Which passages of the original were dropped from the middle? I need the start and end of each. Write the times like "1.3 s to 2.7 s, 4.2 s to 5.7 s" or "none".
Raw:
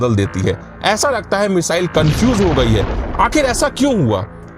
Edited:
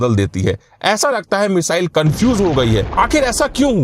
2.9 s to 3.1 s